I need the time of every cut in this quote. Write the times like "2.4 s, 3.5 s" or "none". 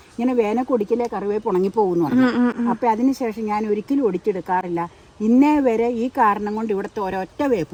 none